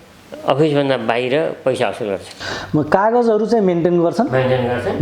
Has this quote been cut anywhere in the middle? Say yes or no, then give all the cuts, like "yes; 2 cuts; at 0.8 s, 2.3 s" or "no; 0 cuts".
no; 0 cuts